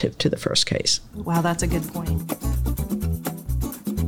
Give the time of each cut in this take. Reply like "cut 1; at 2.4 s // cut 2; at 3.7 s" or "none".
cut 1; at 1.9 s